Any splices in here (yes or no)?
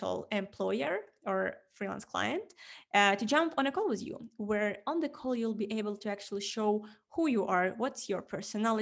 no